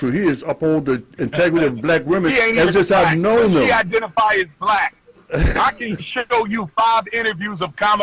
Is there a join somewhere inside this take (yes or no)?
no